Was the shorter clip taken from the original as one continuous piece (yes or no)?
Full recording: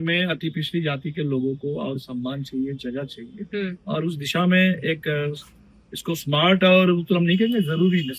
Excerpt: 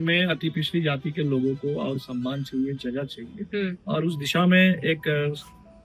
yes